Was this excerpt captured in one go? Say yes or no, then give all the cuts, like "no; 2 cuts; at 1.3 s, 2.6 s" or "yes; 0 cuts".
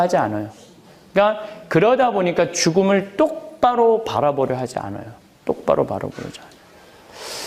yes; 0 cuts